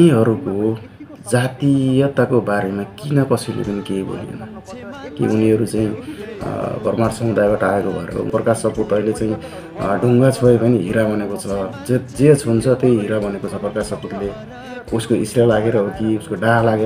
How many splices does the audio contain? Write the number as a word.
one